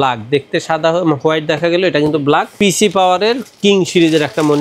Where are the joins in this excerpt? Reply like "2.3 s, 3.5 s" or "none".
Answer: 2.5 s